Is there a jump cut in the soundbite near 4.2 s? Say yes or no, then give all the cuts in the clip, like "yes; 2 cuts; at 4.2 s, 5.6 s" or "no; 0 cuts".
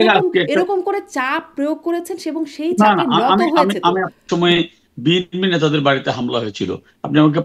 yes; 1 cut; at 4.2 s